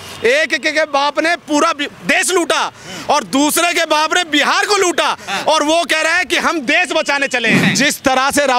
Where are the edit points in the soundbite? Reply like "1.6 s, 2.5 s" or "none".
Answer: 7.6 s